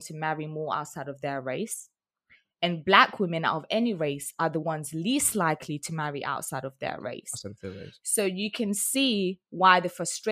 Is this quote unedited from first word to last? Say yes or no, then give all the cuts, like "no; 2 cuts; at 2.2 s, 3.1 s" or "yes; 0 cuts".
yes; 0 cuts